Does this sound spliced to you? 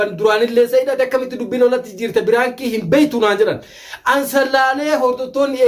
no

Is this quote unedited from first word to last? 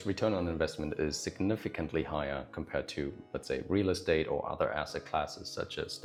yes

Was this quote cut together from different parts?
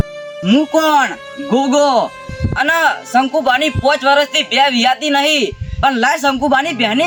no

